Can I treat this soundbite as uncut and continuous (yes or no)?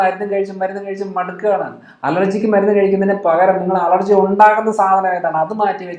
yes